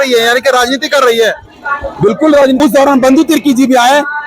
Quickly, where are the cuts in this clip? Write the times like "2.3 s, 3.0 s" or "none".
2.6 s